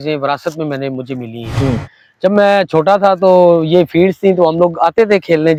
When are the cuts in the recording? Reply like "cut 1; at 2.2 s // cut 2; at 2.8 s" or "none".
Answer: none